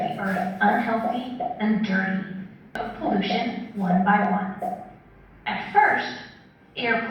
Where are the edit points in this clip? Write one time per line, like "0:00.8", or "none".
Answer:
0:02.8